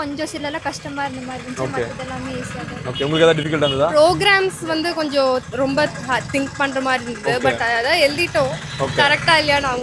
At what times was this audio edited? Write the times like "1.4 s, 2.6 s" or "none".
none